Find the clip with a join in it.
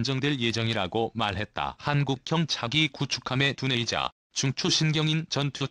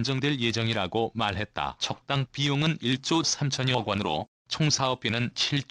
second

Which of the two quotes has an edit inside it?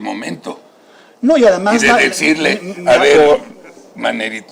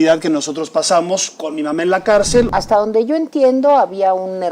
second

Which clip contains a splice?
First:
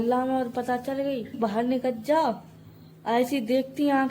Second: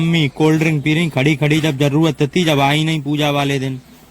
first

